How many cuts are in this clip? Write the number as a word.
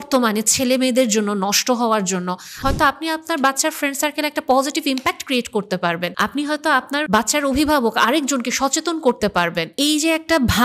four